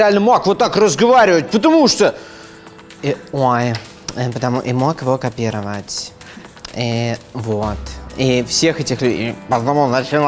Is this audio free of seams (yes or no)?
yes